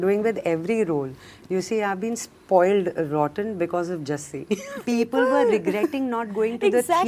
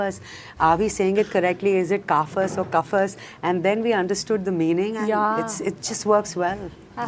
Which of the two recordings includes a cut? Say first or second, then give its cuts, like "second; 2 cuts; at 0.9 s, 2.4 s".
first; 1 cut; at 4.8 s